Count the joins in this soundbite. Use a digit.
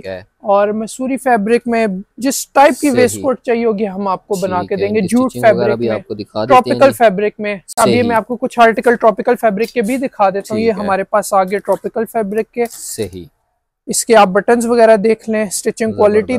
0